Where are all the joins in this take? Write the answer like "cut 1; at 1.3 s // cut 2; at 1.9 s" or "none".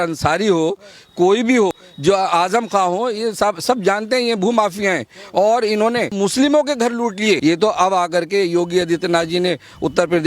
cut 1; at 1.9 s // cut 2; at 6.1 s // cut 3; at 7.4 s